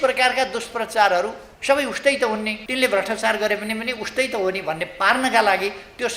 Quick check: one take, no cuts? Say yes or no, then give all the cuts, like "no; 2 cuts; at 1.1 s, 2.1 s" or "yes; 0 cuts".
no; 2 cuts; at 1.5 s, 2.6 s